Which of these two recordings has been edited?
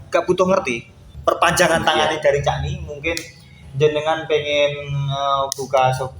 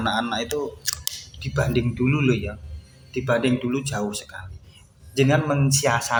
first; 1 cut; at 1.0 s

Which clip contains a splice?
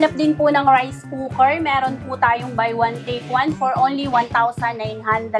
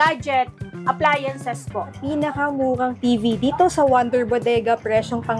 second; 2 cuts; at 1.9 s, 3.0 s

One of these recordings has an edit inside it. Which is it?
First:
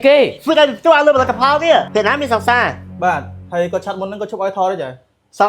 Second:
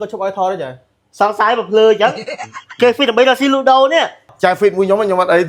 first; 1 cut; at 1.9 s

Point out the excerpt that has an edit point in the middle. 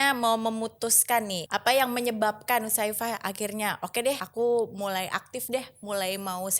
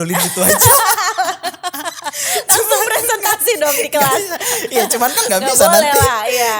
first; 2 cuts; at 1.4 s, 4.3 s

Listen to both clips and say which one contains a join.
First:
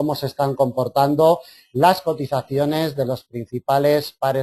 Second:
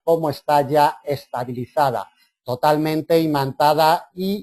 first; 1 cut; at 1.5 s

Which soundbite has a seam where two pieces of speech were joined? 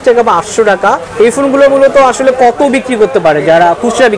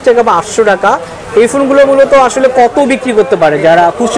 first; 1 cut; at 1.1 s

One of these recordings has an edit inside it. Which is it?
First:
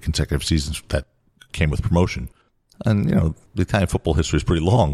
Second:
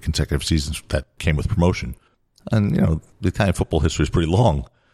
second; 1 cut; at 1.1 s

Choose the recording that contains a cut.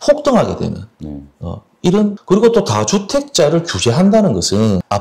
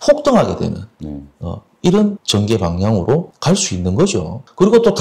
first; 1 cut; at 2.2 s

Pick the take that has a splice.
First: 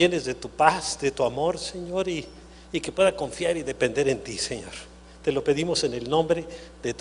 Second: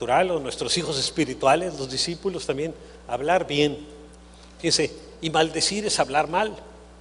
first; 1 cut; at 3.4 s

